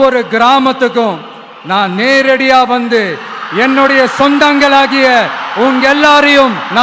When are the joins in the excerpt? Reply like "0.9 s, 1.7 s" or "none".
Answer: none